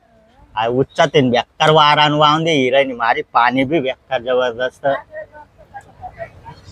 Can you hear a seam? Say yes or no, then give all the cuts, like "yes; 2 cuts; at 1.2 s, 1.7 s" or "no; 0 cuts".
no; 0 cuts